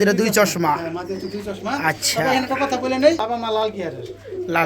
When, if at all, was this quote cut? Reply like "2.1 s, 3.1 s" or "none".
3.2 s